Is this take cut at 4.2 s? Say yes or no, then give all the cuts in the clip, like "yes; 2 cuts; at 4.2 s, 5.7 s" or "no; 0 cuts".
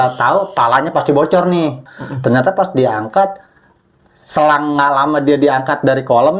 no; 1 cut; at 1.9 s